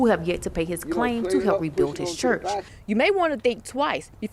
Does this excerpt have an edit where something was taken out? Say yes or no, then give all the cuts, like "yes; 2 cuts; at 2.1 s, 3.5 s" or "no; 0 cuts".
yes; 1 cut; at 2.7 s